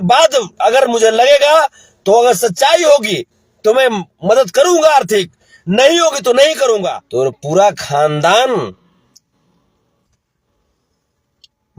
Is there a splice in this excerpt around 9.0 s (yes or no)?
no